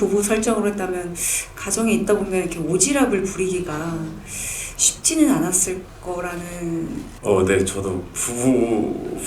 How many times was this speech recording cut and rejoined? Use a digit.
1